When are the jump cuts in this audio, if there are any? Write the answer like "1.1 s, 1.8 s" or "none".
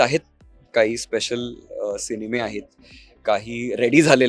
none